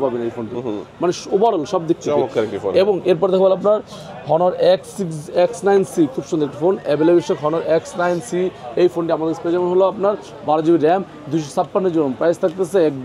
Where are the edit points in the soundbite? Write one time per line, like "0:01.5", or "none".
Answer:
none